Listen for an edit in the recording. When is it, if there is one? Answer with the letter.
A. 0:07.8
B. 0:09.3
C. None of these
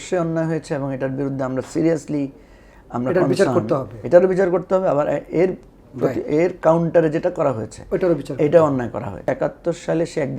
B